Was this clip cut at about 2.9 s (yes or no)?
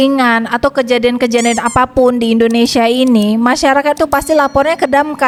no